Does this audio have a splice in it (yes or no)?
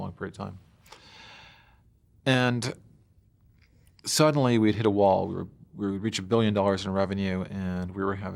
no